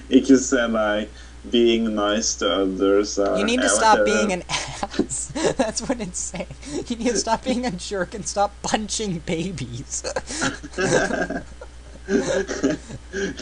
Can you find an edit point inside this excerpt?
yes; 1 cut; at 5.2 s

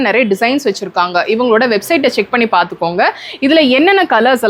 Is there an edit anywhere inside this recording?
no; 0 cuts

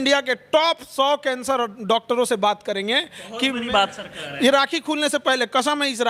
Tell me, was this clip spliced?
no; 0 cuts

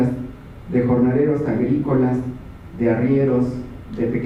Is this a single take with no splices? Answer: yes; 0 cuts

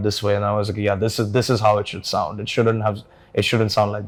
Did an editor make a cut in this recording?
no; 0 cuts

